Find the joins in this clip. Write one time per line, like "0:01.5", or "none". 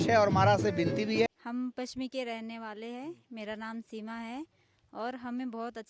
0:01.3